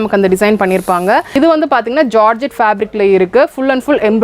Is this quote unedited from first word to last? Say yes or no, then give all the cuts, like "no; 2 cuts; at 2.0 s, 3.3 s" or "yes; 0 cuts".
no; 1 cut; at 1.4 s